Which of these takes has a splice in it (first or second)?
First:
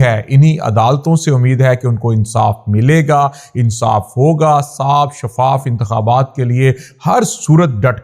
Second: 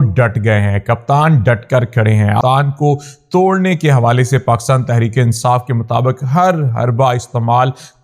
second